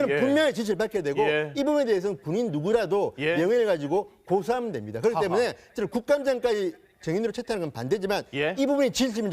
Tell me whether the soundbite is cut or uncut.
uncut